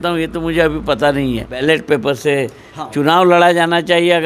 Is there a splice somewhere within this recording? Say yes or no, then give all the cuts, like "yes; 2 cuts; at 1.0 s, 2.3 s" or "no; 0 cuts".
yes; 1 cut; at 1.6 s